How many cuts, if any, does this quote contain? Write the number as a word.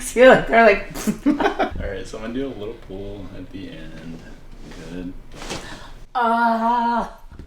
one